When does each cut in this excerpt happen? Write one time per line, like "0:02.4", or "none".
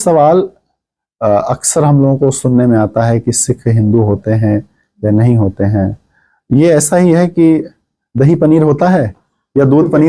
none